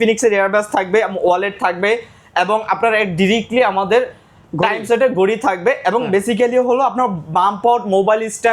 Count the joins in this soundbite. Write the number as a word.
zero